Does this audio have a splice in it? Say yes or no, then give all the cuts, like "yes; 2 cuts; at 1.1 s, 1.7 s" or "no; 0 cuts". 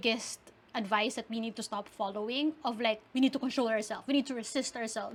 no; 0 cuts